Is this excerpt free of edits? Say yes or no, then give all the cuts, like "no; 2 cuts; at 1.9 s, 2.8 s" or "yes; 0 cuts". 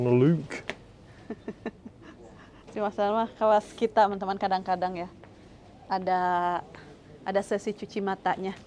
yes; 0 cuts